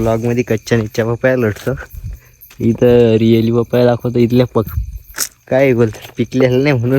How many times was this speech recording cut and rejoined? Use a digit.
1